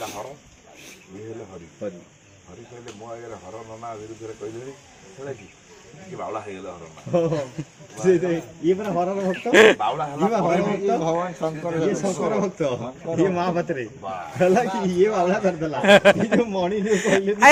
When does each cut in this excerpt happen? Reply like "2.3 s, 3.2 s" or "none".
none